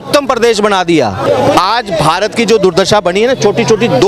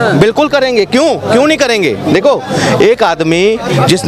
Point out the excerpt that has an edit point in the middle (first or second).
first